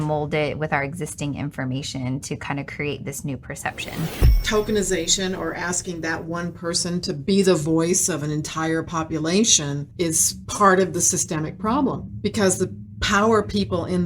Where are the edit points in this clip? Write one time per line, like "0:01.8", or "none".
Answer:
0:04.4